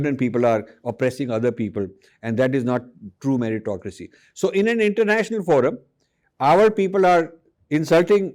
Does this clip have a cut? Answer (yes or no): no